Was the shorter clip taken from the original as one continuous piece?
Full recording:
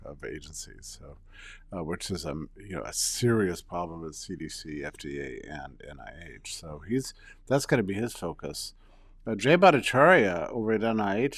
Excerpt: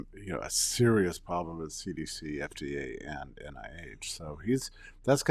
yes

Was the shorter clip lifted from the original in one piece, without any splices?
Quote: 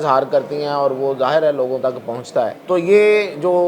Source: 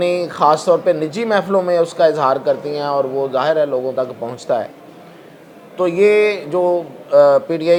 no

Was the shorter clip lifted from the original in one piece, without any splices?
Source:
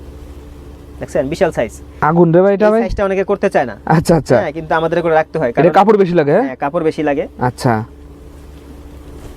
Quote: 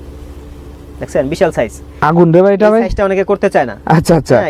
yes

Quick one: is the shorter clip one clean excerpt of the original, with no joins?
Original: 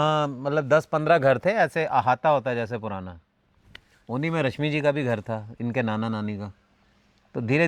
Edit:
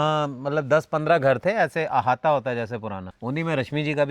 no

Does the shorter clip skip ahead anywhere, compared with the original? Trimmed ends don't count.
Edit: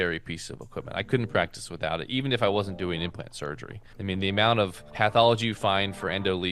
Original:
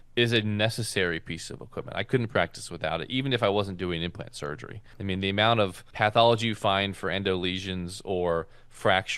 no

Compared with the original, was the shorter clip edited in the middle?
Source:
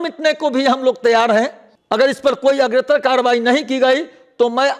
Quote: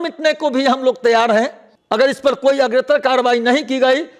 no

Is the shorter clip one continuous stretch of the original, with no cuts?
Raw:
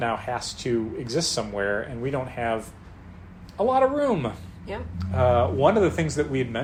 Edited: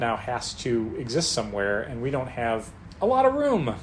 no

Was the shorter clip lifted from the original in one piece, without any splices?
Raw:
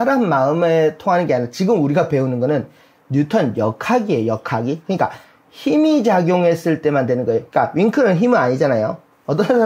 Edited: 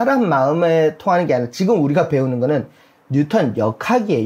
yes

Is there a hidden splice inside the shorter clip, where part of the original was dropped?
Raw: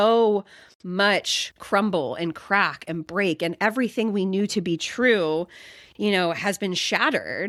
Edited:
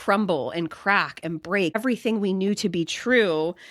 yes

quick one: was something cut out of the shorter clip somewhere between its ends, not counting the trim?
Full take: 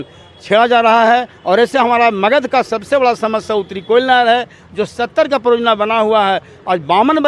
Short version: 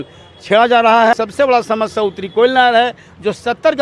yes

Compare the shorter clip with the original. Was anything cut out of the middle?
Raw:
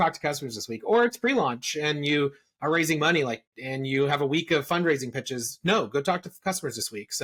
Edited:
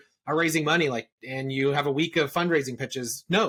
no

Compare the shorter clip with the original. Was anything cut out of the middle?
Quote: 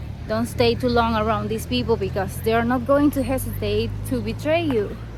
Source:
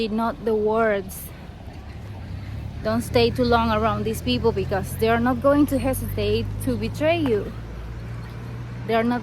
no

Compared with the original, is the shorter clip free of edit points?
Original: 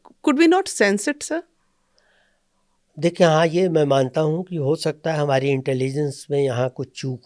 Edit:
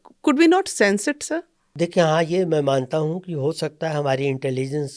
no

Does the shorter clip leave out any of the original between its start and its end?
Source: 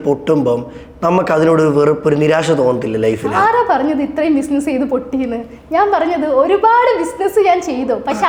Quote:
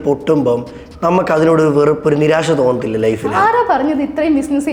no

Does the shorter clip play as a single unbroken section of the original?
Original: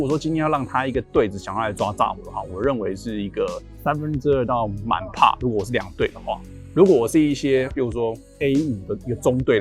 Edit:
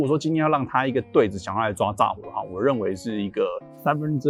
yes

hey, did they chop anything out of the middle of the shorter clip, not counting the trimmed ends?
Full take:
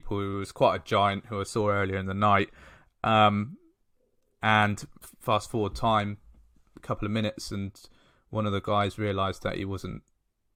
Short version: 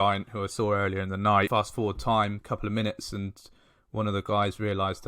yes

